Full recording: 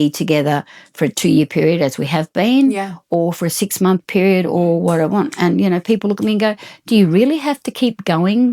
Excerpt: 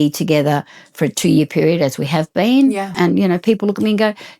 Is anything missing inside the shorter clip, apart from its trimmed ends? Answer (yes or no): yes